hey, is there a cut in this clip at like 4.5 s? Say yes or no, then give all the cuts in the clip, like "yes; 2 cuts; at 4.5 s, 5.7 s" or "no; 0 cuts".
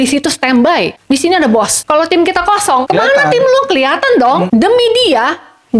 yes; 4 cuts; at 1.0 s, 1.8 s, 2.8 s, 4.5 s